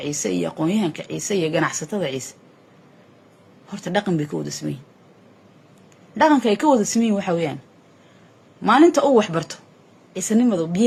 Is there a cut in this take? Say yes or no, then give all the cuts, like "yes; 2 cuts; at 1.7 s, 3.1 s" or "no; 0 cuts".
no; 0 cuts